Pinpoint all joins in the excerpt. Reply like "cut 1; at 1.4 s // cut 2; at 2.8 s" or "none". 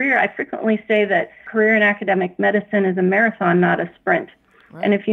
cut 1; at 1.4 s